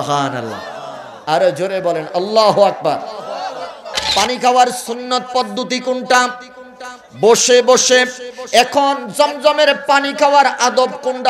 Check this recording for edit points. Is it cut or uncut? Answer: cut